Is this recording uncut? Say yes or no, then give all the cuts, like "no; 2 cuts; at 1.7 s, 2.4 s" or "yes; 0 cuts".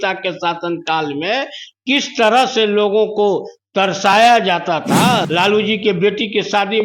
no; 1 cut; at 5.2 s